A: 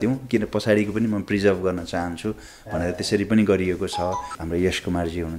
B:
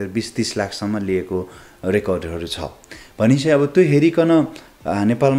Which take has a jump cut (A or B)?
A